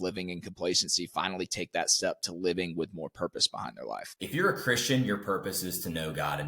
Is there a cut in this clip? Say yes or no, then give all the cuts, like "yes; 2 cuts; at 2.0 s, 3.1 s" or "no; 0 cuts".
yes; 1 cut; at 4.1 s